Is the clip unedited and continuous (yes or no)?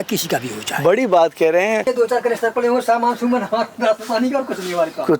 no